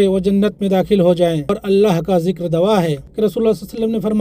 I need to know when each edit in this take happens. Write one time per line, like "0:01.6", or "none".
0:01.6
0:03.1

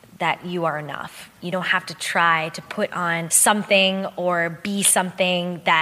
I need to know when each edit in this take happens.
0:01.3
0:03.3

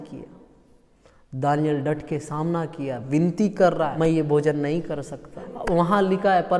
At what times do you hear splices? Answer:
0:03.9
0:05.5

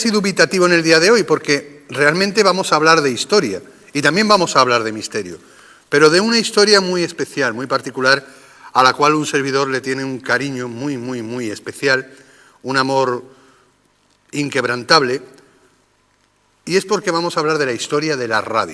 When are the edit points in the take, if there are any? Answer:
none

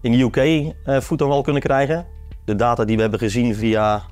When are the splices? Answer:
none

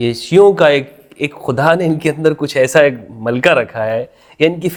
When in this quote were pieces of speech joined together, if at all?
none

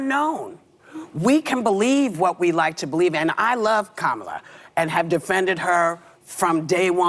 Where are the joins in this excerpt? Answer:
0:03.2

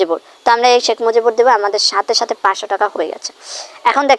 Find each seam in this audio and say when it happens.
none

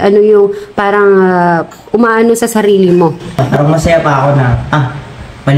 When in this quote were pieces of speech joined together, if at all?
0:03.4

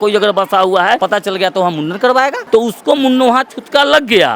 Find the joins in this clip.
0:01.0
0:02.4

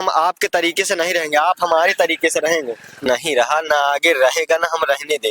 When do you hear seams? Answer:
0:03.0

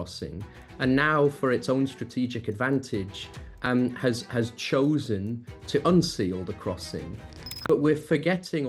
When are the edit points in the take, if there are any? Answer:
0:07.7

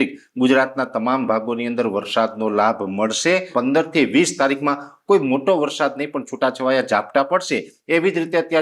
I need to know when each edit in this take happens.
0:03.5

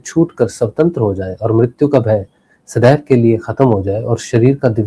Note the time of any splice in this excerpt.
none

